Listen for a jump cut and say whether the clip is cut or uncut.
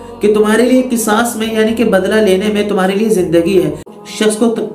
cut